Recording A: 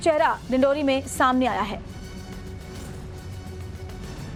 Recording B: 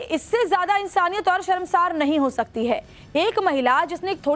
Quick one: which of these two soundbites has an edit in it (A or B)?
B